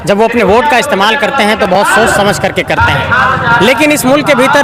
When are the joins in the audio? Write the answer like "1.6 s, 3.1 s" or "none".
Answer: none